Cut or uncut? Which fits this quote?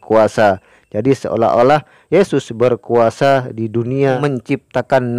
cut